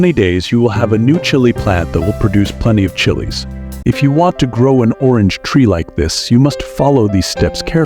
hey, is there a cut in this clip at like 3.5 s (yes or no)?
yes